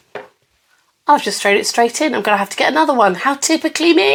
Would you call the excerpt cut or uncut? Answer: uncut